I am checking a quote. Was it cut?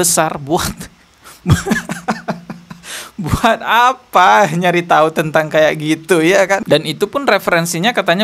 yes; 1 cut; at 6.6 s

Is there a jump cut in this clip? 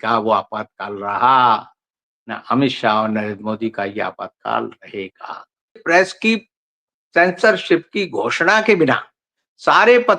yes; 1 cut; at 5.8 s

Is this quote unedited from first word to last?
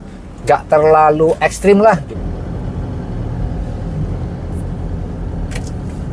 no; 1 cut; at 2.1 s

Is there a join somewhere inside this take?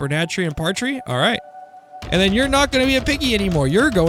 no; 0 cuts

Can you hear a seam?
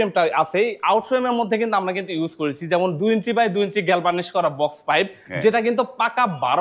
no; 0 cuts

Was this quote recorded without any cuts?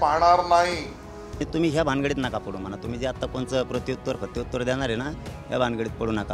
yes; 0 cuts

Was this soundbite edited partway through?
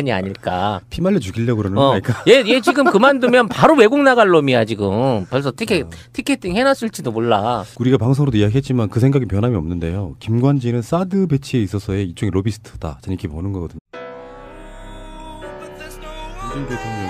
no; 0 cuts

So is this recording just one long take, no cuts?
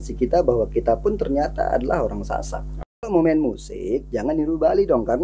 no; 1 cut; at 3.1 s

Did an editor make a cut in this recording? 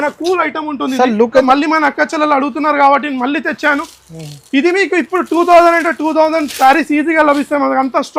yes; 1 cut; at 1.4 s

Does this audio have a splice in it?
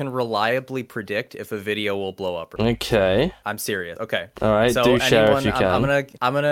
no; 0 cuts

